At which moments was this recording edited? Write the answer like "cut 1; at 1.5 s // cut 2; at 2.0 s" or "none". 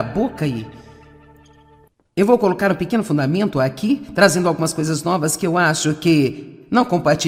none